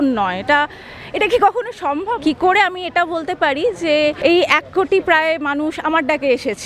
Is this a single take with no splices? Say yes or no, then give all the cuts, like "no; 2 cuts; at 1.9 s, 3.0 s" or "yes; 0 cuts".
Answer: no; 2 cuts; at 2.2 s, 4.2 s